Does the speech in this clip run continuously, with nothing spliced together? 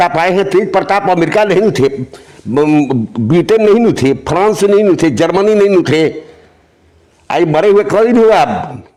yes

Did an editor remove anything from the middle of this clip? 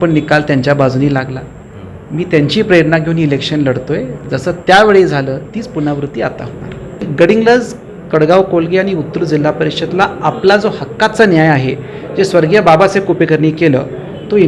yes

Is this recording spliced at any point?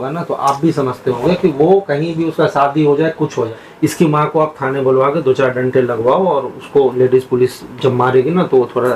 yes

